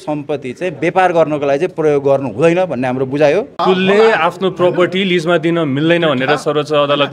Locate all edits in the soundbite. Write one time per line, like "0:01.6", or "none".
0:03.5